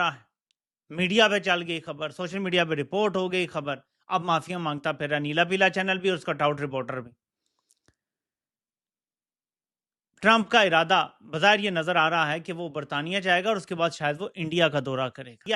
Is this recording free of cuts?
yes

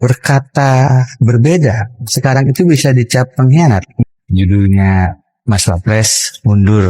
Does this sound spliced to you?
yes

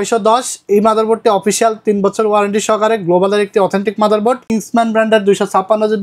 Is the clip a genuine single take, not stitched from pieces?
no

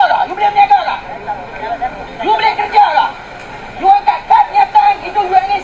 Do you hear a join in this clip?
no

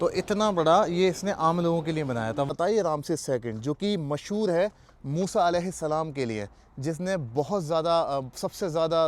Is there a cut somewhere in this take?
yes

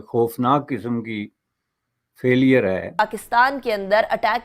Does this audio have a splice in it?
yes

